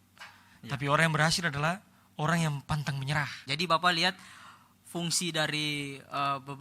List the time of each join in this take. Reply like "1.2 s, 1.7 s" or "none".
3.4 s